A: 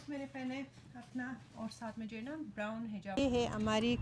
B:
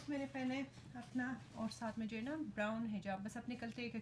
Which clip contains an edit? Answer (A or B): A